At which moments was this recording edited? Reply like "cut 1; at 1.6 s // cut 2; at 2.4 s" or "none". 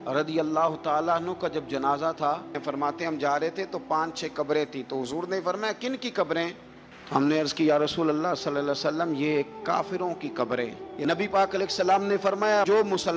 cut 1; at 2.6 s // cut 2; at 10.8 s